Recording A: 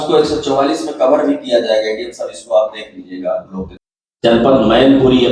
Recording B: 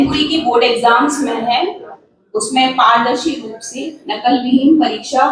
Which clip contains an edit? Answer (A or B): A